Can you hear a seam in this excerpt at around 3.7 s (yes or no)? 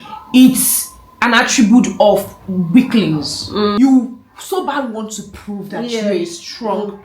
yes